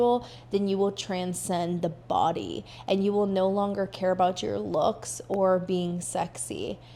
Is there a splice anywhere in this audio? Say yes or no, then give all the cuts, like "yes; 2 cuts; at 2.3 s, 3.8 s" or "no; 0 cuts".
no; 0 cuts